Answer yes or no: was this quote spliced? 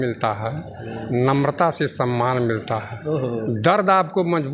no